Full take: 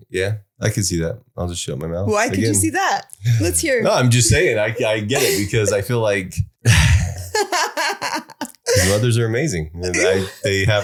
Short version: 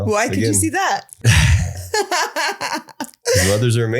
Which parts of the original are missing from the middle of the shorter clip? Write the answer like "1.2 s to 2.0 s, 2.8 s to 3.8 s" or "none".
3.1 s to 6.5 s